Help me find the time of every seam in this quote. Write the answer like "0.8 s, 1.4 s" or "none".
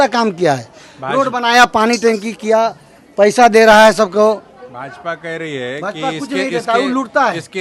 none